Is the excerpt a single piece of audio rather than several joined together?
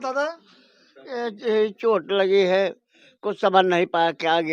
yes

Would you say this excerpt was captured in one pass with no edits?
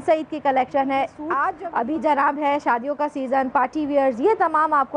no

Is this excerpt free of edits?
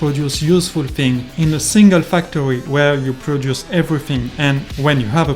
no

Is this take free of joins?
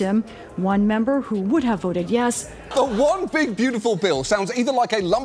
no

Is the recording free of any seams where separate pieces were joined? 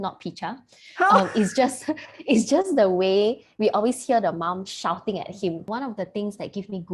no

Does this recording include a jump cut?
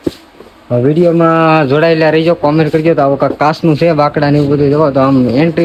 no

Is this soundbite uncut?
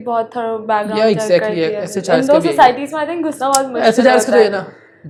yes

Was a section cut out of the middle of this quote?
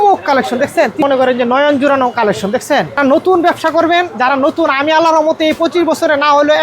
yes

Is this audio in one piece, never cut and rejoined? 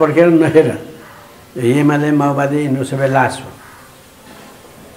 yes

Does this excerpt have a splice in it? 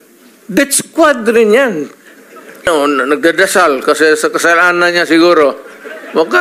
yes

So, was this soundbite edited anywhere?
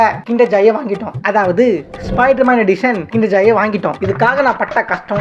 yes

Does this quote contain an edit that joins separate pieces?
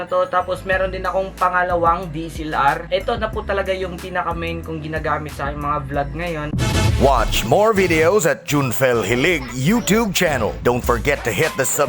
yes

